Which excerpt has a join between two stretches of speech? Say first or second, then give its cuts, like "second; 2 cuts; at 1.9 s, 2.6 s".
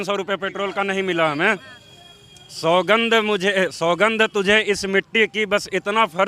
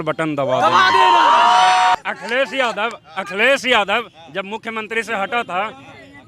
second; 1 cut; at 1.9 s